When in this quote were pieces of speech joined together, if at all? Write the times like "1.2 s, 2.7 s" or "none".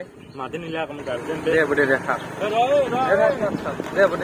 none